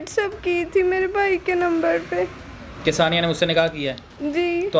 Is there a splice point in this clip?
no; 0 cuts

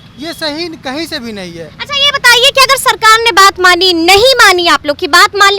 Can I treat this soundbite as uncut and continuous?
yes; 0 cuts

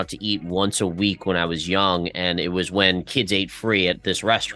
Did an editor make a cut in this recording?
no; 0 cuts

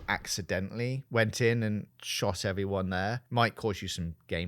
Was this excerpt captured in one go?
no; 3 cuts; at 1.0 s, 2.0 s, 3.2 s

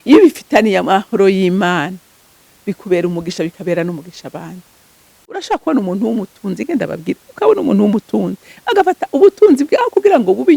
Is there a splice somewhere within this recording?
yes; 1 cut; at 5.4 s

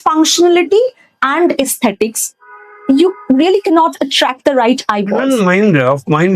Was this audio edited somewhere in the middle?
yes; 1 cut; at 5.1 s

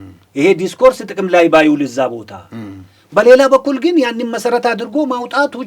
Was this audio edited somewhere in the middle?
no; 0 cuts

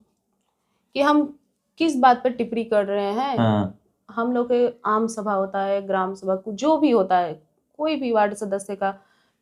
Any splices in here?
no; 0 cuts

